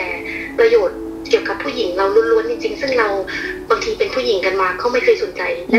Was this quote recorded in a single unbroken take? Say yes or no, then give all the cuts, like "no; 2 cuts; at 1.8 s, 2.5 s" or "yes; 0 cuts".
yes; 0 cuts